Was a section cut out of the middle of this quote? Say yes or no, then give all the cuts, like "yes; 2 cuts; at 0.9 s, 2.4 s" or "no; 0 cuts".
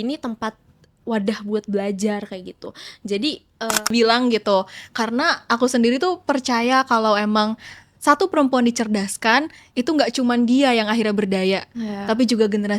yes; 1 cut; at 3.9 s